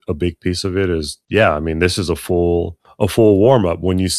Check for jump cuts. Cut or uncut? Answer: cut